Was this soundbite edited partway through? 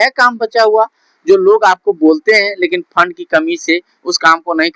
no; 0 cuts

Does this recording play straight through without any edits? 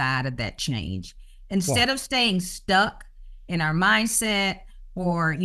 yes; 0 cuts

